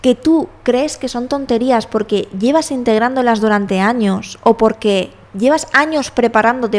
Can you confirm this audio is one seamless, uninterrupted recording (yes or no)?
yes